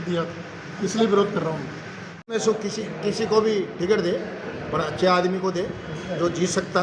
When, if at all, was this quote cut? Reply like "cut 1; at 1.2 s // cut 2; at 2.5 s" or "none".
cut 1; at 2.3 s